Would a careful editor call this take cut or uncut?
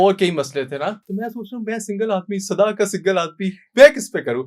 cut